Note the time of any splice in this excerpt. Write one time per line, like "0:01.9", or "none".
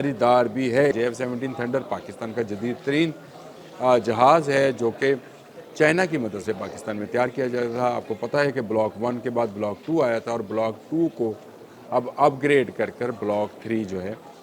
0:00.9

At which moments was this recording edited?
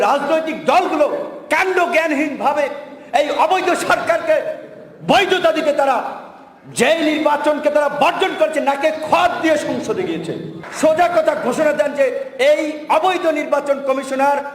0:10.6

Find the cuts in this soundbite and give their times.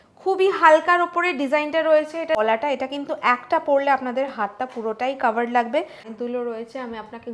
0:02.4
0:06.0

